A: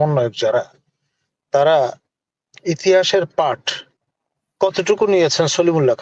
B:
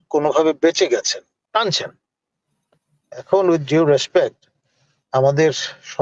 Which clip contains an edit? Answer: B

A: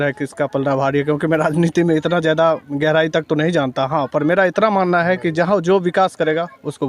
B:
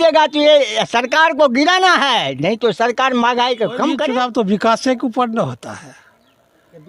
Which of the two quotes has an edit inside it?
B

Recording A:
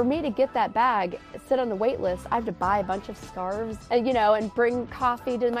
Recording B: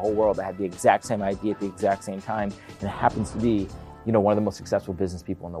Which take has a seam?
A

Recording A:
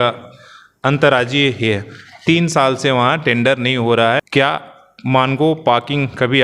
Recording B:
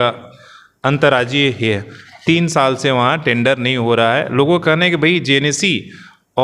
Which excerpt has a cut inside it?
A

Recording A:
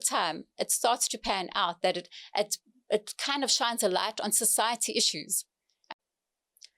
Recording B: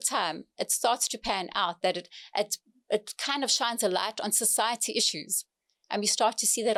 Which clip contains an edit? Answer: A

